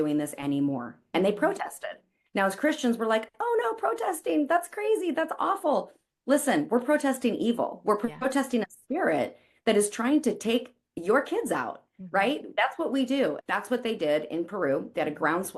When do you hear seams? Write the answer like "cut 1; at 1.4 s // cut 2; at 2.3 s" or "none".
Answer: cut 1; at 13.4 s